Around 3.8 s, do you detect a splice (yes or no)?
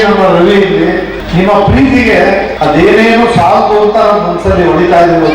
no